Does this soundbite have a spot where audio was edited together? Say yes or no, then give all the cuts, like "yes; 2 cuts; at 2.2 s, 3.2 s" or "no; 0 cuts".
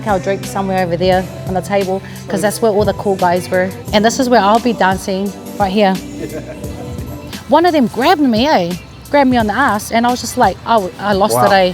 yes; 2 cuts; at 3.8 s, 7.3 s